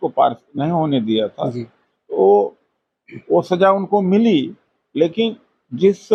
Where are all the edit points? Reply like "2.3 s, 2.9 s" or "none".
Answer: none

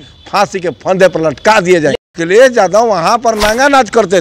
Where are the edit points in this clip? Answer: 2.1 s

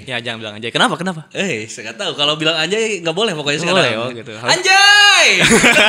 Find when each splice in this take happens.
none

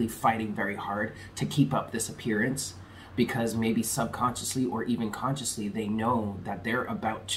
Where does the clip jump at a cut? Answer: none

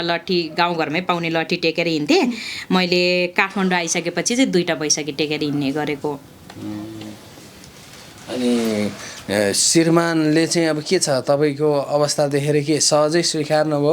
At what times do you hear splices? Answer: none

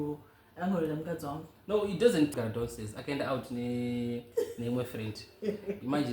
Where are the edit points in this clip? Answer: 2.4 s

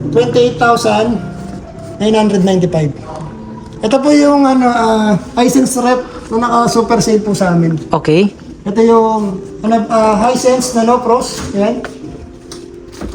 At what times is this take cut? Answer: none

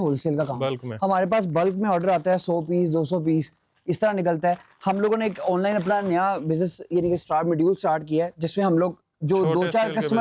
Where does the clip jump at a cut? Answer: none

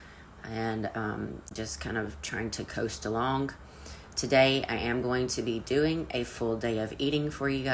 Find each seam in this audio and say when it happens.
1.6 s

